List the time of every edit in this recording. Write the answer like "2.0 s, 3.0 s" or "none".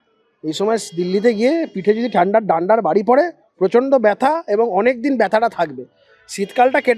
none

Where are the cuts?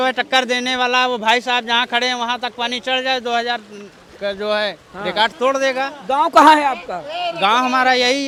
none

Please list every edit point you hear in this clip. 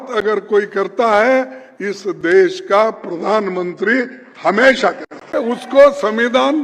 5.3 s

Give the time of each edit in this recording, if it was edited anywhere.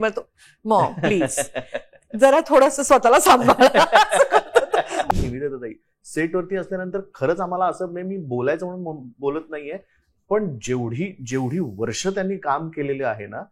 5.1 s

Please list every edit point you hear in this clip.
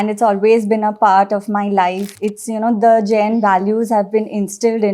2.1 s

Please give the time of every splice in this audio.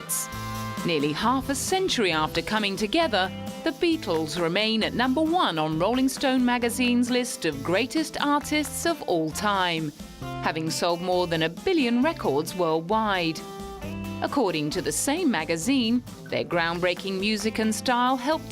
5.5 s

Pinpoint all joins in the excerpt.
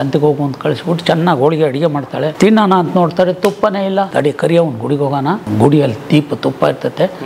2.3 s, 4.1 s, 5.5 s

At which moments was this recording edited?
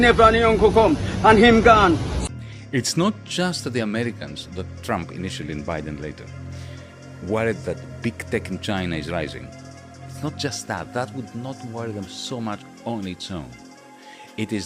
2.2 s

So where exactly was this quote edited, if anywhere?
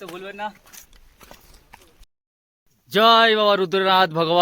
2.2 s

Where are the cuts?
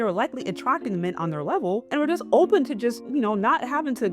1.9 s, 3.0 s

